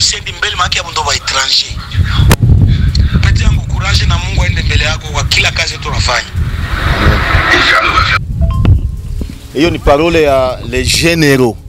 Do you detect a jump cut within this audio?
no; 0 cuts

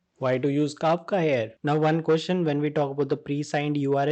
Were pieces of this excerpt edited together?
yes; 1 cut; at 1.5 s

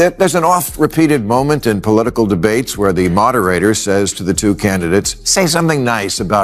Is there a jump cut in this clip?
no; 0 cuts

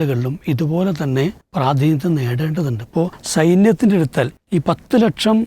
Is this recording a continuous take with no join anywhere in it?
no; 3 cuts; at 1.4 s, 3.2 s, 4.4 s

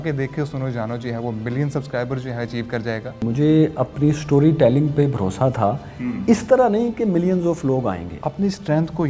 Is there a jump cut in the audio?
yes; 2 cuts; at 3.2 s, 8.1 s

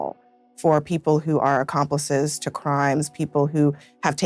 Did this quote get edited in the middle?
no; 0 cuts

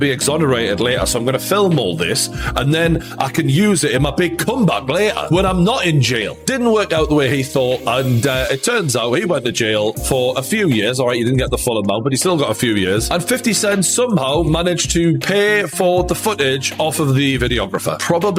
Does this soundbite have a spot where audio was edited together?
no; 0 cuts

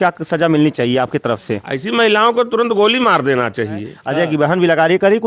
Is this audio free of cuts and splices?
no; 1 cut; at 4.0 s

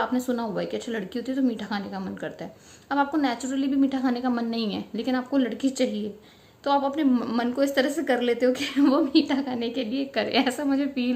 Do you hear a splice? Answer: no; 0 cuts

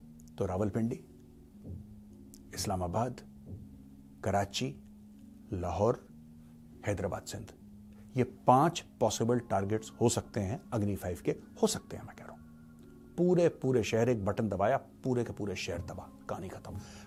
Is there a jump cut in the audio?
no; 0 cuts

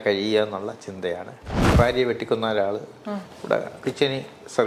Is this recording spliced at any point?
yes; 1 cut; at 1.6 s

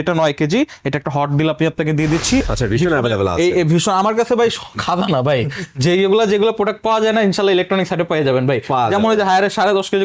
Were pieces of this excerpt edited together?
yes; 1 cut; at 2.5 s

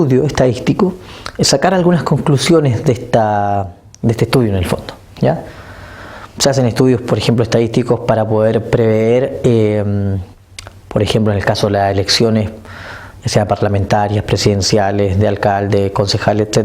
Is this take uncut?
no; 1 cut; at 14.6 s

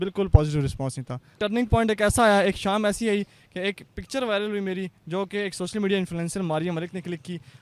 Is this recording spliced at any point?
yes; 1 cut; at 1.3 s

